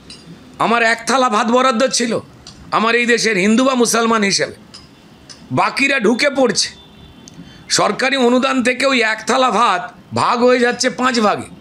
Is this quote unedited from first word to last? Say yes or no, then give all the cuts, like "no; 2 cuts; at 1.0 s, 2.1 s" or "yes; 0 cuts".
yes; 0 cuts